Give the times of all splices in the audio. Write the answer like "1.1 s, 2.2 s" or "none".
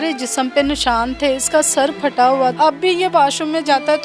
2.5 s